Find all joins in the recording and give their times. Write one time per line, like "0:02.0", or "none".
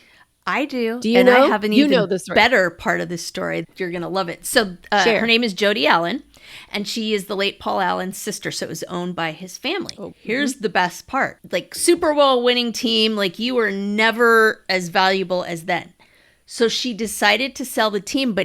0:03.7
0:10.0
0:11.4